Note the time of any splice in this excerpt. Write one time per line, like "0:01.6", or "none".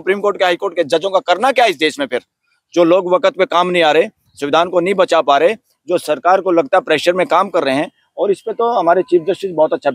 none